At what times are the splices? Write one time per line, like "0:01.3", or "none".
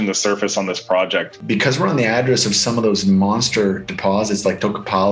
0:01.4